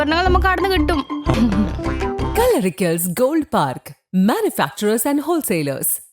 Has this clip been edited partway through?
yes; 1 cut; at 1.3 s

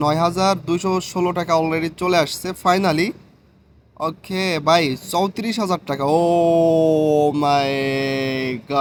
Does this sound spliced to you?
no; 0 cuts

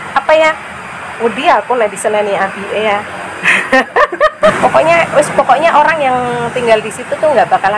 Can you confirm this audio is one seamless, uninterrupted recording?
no; 1 cut; at 4.6 s

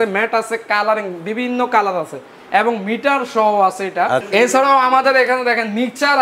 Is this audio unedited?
no; 1 cut; at 4.2 s

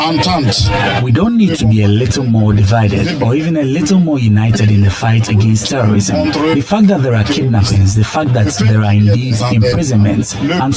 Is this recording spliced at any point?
no; 0 cuts

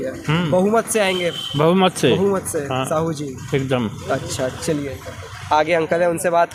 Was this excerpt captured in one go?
yes; 0 cuts

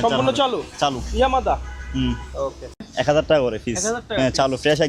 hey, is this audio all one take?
no; 1 cut; at 2.7 s

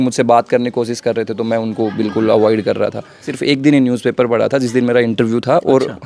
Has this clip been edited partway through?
yes; 1 cut; at 3.3 s

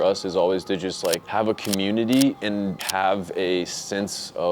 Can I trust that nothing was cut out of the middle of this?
no; 1 cut; at 2.8 s

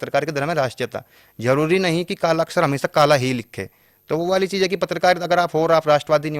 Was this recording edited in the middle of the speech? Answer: no; 0 cuts

